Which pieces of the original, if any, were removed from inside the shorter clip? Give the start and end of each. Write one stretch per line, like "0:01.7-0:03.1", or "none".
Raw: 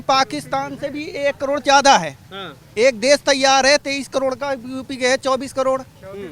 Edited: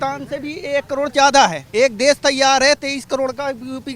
0:02.1-0:02.6

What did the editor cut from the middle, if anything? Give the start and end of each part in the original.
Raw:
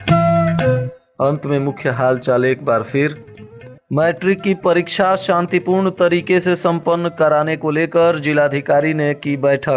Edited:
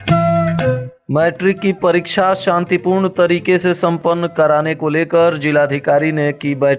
0:00.9-0:03.7

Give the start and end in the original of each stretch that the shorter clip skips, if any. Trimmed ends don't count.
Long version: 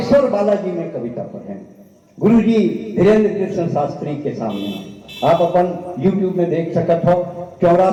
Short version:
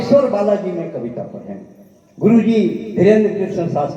none

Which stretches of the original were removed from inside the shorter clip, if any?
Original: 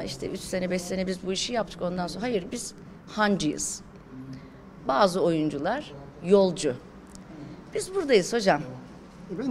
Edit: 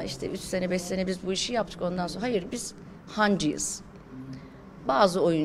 none

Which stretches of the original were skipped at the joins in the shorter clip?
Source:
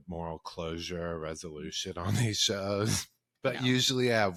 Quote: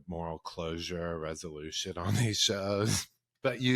none

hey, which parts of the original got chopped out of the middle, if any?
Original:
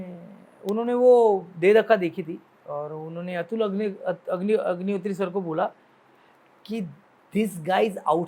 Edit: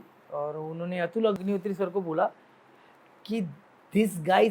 0:03.7-0:04.8

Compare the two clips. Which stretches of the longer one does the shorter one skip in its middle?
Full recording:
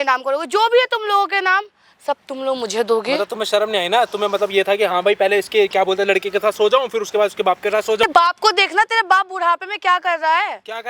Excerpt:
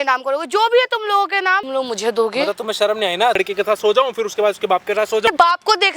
0:01.7-0:02.4
0:04.1-0:06.1

